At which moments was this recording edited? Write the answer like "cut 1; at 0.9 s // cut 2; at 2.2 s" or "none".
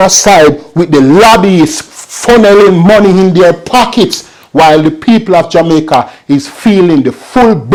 none